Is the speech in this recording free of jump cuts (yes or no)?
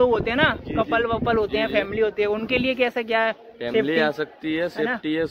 yes